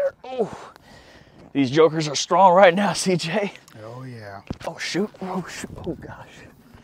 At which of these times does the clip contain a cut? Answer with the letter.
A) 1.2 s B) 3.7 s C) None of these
C